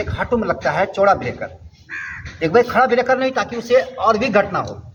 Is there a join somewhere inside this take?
no; 0 cuts

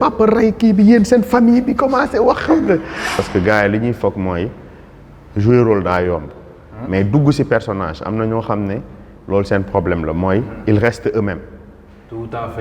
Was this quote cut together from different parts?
yes; 1 cut; at 3.2 s

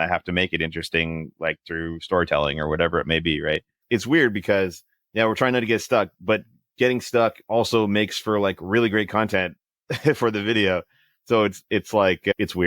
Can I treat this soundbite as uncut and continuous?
no; 1 cut; at 3.8 s

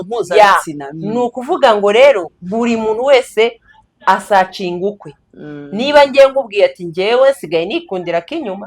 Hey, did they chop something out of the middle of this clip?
no; 0 cuts

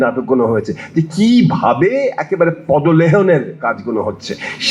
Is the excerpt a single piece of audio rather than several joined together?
yes; 0 cuts

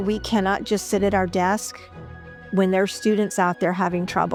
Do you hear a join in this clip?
no; 0 cuts

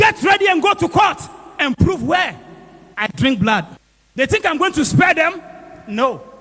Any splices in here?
no; 0 cuts

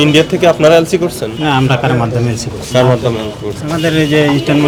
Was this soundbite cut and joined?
no; 0 cuts

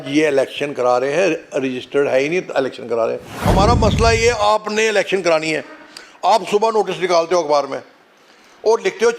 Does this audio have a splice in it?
yes; 1 cut; at 3.3 s

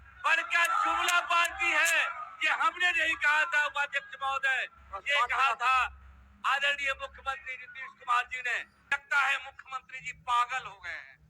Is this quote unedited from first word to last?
no; 1 cut; at 8.7 s

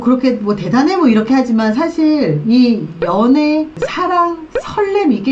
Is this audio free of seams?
yes; 0 cuts

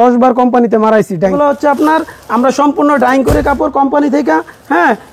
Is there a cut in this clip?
yes; 1 cut; at 1.3 s

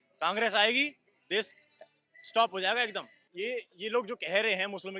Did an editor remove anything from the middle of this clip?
yes; 1 cut; at 3.2 s

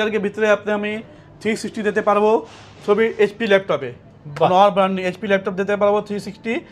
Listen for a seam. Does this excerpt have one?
no; 0 cuts

